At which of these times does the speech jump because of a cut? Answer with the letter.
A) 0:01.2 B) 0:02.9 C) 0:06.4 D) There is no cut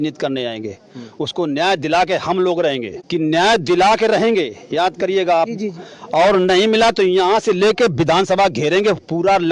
B